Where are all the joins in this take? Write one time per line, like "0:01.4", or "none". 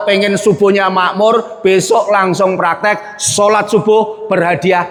none

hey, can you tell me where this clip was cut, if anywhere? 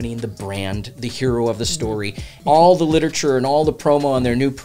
0:02.3

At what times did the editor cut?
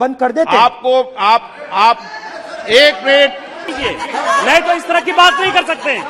0:03.7

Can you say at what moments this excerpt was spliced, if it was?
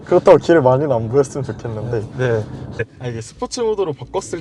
0:02.8

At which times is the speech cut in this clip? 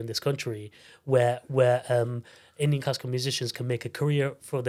none

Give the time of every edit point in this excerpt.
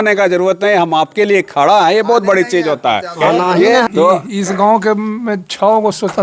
0:03.8

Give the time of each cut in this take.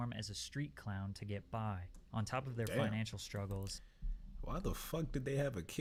none

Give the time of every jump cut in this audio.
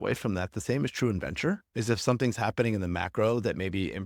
none

